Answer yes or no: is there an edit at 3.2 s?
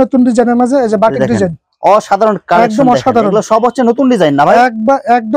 no